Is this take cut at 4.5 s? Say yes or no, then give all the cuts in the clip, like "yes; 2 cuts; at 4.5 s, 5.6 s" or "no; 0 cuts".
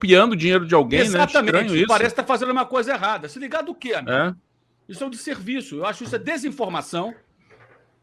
no; 0 cuts